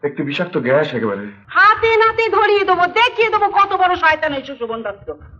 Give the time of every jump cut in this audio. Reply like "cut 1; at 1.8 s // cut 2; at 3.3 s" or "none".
cut 1; at 1.4 s